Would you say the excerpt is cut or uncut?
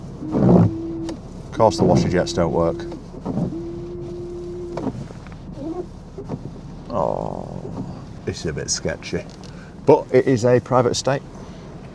uncut